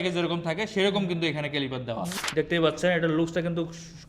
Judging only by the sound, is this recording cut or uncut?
cut